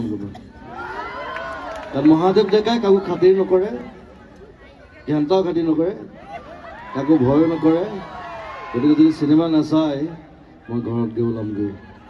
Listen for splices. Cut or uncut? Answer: uncut